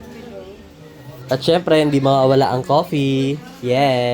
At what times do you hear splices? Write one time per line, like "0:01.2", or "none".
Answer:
0:01.3